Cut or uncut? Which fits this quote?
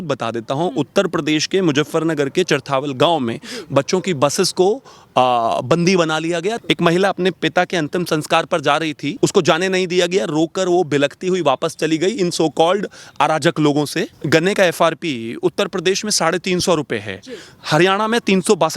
cut